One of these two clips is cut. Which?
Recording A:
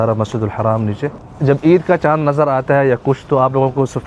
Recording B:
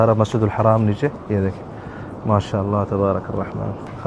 A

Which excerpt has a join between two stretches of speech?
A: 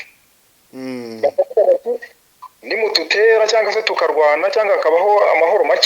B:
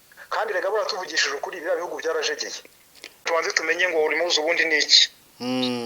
B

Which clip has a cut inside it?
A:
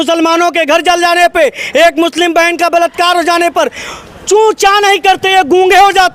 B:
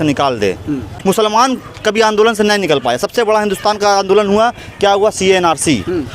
B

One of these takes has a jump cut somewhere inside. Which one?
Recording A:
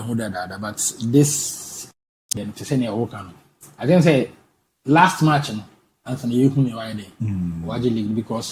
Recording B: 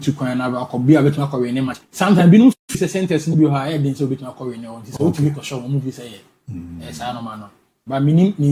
A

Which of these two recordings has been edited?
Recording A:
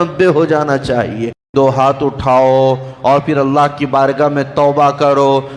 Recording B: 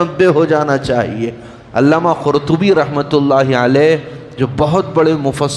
A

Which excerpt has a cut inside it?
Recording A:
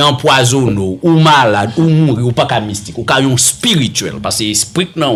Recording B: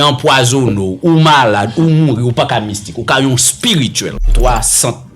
B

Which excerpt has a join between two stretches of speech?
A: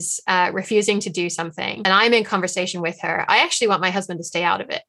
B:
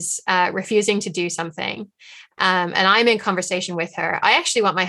A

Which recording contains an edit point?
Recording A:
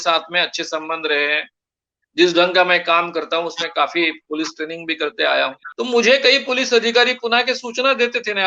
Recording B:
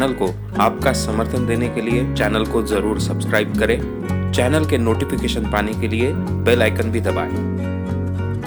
A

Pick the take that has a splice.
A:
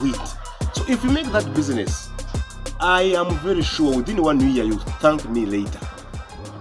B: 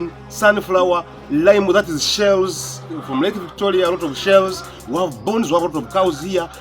B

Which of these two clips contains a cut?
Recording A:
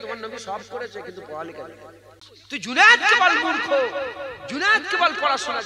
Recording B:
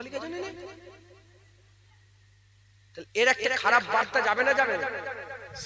A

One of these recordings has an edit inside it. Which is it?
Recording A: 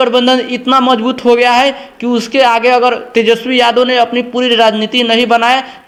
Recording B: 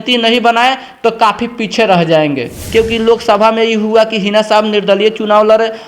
B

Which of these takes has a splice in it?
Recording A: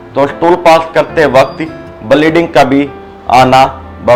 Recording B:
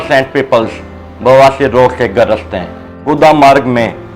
B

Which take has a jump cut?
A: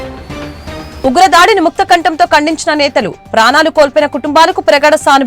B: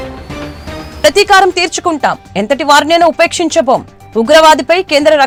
A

